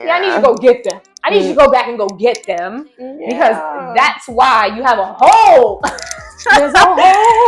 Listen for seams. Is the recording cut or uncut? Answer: uncut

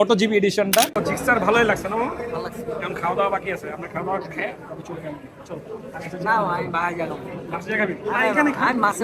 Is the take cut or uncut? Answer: cut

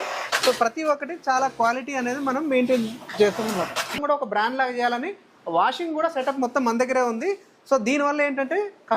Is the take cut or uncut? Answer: cut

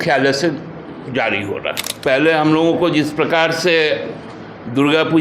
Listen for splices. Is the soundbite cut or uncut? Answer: cut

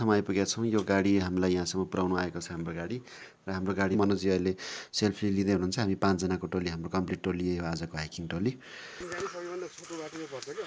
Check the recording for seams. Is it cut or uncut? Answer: cut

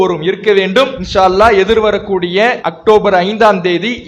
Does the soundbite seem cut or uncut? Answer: cut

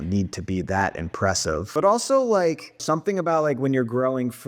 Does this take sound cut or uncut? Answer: cut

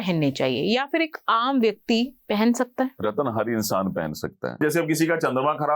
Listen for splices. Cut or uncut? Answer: cut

